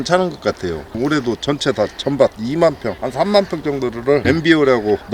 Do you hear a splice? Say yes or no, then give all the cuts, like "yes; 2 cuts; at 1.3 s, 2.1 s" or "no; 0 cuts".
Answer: yes; 1 cut; at 1.0 s